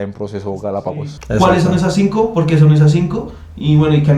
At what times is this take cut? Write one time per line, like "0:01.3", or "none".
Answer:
0:01.1

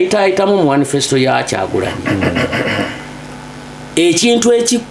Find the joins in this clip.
none

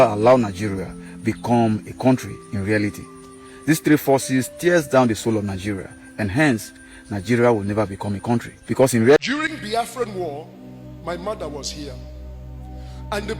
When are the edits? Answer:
0:09.2

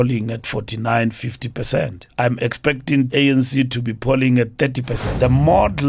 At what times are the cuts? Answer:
0:02.0
0:03.1
0:05.1

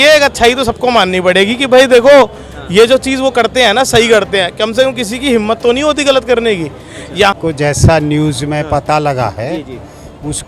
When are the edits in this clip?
0:07.3

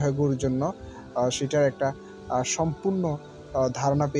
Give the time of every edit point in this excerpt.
none

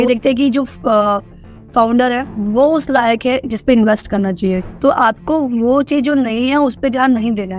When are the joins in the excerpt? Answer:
0:04.7

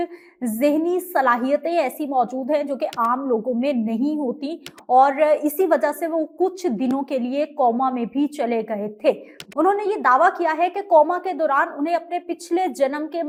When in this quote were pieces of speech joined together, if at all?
none

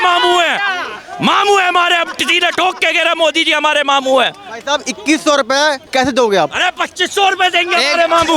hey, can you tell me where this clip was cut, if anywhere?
none

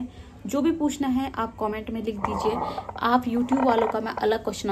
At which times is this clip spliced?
none

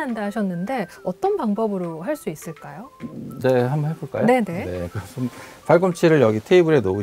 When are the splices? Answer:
none

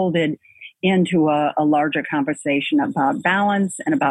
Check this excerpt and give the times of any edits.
none

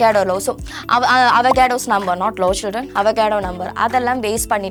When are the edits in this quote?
none

